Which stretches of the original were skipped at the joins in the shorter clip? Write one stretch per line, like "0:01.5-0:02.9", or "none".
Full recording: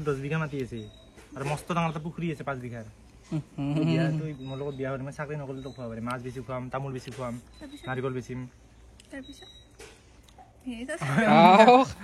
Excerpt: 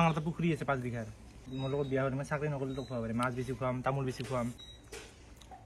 0:03.2-0:04.3
0:07.5-0:09.5